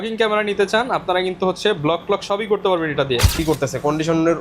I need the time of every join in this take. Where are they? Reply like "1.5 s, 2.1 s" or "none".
3.4 s